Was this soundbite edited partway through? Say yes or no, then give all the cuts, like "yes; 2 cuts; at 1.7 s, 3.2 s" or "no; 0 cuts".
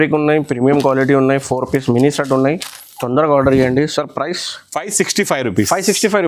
no; 0 cuts